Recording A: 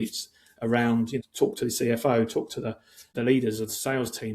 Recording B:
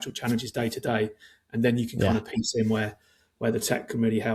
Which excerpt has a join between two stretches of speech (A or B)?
A